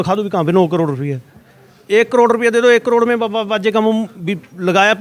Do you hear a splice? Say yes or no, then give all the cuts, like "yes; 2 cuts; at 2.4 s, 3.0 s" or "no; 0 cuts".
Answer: no; 0 cuts